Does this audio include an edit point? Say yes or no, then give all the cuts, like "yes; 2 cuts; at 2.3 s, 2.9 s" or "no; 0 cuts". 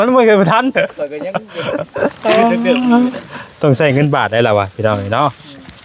no; 0 cuts